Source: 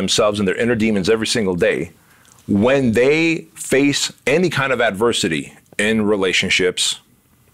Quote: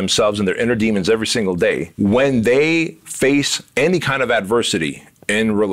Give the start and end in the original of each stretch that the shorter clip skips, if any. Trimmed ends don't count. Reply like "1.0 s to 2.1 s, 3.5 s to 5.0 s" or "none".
1.9 s to 2.4 s